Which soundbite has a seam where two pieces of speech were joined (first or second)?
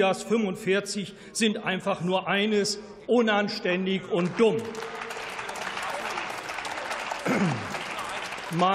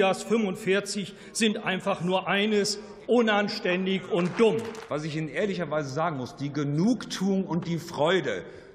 second